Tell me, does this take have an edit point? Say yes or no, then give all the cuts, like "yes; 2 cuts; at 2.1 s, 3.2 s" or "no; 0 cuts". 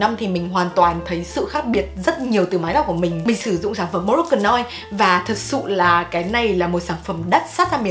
no; 0 cuts